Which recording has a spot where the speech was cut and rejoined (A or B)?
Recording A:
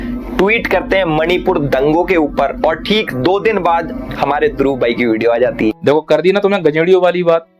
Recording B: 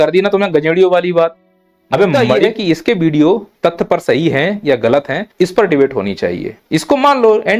B